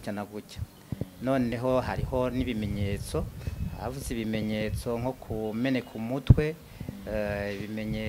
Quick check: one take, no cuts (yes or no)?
yes